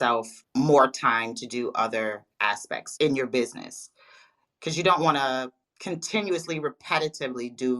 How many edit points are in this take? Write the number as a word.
one